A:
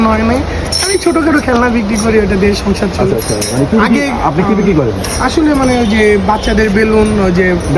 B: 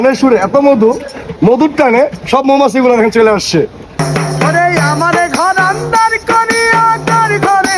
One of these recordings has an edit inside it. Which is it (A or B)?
B